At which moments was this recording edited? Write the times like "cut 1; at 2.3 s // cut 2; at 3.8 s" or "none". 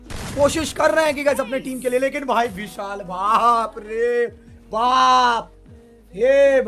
none